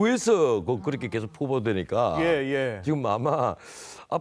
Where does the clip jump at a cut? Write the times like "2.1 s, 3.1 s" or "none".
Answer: none